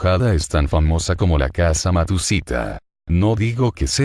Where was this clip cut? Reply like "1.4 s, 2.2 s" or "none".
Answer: 1.5 s, 2.9 s